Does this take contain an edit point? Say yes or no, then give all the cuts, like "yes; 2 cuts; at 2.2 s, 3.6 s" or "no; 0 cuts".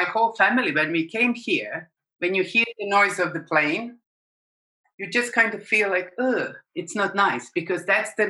no; 0 cuts